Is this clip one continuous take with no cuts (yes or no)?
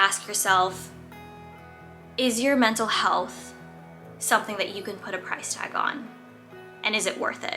yes